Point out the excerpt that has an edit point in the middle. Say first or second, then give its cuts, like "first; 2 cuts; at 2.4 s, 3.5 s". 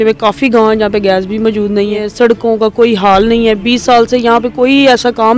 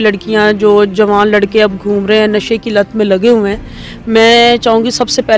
first; 1 cut; at 2.1 s